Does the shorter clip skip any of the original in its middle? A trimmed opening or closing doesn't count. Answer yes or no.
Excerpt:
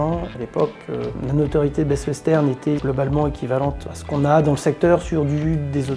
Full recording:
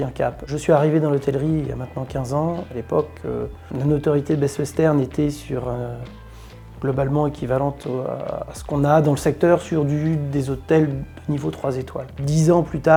yes